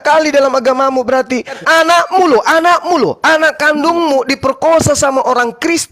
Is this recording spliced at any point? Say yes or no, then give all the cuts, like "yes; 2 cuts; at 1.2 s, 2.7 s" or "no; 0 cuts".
yes; 1 cut; at 1.6 s